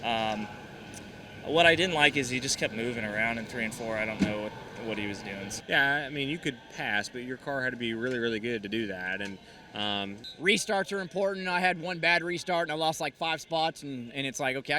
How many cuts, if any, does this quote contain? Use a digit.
2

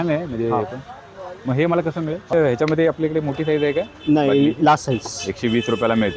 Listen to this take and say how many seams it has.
1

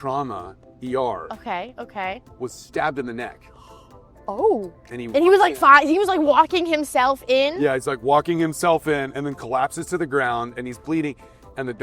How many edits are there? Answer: 1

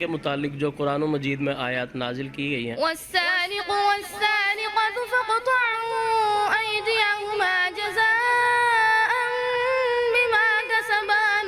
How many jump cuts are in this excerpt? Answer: 1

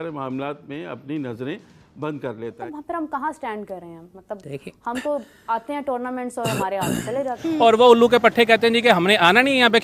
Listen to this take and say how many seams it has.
2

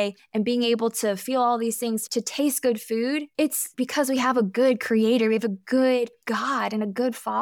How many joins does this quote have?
0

